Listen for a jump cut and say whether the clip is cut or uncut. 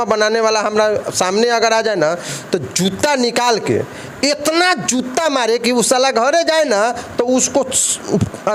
uncut